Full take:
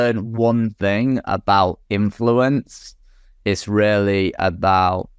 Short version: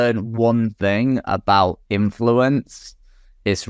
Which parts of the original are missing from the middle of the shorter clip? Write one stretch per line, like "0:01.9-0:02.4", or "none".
none